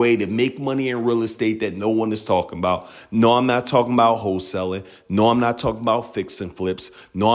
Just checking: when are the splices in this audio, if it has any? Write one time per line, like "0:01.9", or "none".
none